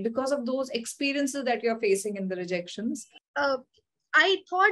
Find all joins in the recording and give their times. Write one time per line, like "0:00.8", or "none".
0:03.1

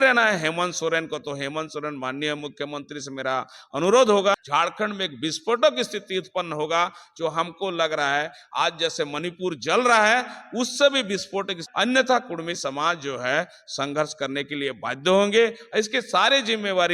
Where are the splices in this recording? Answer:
0:04.4
0:11.6

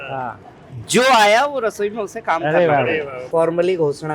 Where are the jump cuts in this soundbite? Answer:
0:03.2

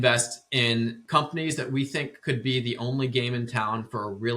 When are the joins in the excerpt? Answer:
0:01.0

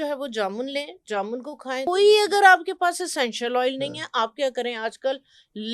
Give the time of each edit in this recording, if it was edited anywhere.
0:01.9

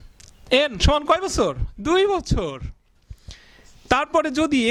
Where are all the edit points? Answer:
none

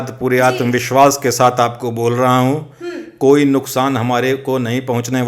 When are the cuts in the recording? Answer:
none

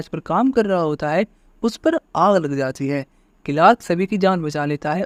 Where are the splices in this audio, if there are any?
none

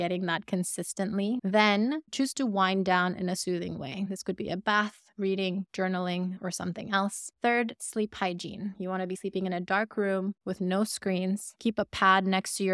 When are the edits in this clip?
0:01.4
0:07.2

